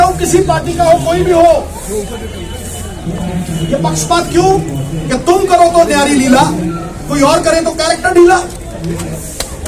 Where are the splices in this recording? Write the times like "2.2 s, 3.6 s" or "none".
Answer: none